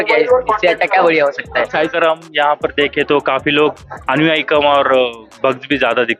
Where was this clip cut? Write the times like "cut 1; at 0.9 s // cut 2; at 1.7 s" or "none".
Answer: cut 1; at 1.9 s